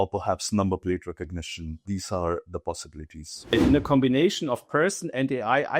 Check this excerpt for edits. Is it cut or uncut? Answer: cut